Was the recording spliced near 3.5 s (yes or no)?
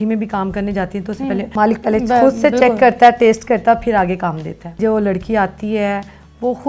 no